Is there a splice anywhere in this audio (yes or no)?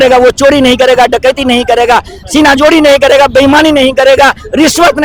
no